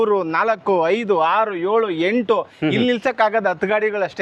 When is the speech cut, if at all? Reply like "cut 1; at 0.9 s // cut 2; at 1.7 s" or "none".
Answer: none